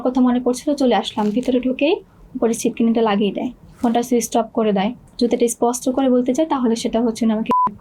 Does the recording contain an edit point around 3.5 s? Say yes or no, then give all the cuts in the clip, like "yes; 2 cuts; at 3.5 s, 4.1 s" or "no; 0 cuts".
yes; 2 cuts; at 3.5 s, 5.0 s